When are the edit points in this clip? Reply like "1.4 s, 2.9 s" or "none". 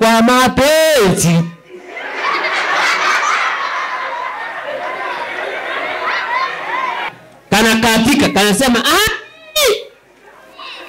7.1 s